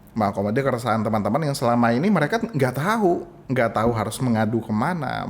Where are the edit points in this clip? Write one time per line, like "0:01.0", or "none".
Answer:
0:03.3